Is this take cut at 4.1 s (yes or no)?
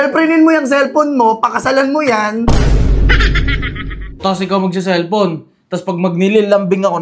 yes